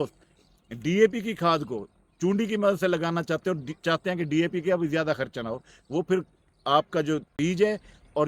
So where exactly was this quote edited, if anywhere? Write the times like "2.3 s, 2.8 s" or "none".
7.4 s